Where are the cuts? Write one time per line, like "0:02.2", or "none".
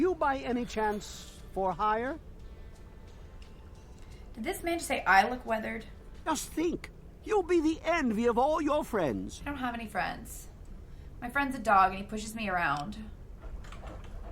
0:06.3
0:13.4